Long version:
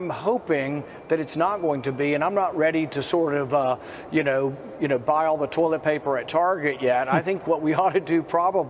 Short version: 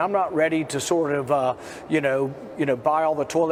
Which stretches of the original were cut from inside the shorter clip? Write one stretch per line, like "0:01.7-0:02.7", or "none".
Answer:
none